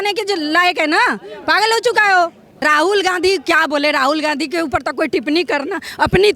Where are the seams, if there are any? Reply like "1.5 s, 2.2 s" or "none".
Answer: 2.5 s